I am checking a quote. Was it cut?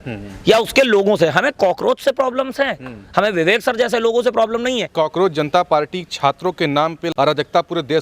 yes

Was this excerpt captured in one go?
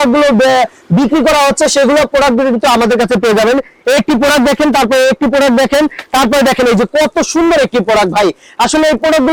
yes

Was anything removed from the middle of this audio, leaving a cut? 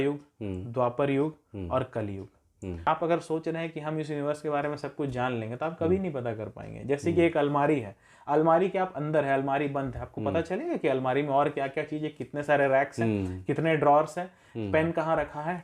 yes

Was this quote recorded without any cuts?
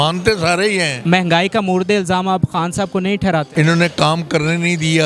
no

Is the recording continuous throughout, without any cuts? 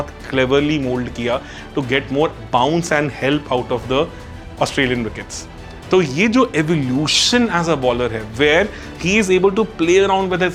yes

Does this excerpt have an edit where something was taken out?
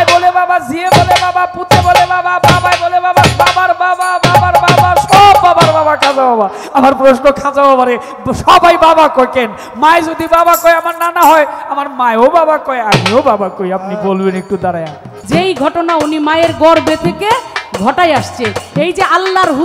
yes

